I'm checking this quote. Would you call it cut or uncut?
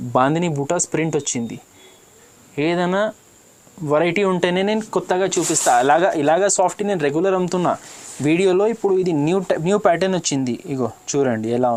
uncut